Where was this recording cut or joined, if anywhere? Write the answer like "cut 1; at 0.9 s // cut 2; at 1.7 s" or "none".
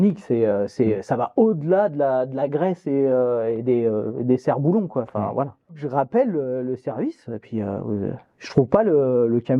cut 1; at 5.8 s